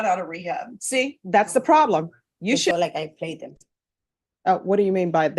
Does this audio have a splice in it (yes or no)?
yes